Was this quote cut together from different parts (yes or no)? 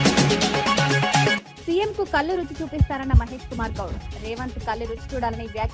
yes